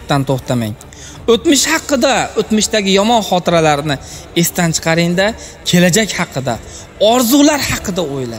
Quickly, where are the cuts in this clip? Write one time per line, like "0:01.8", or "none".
none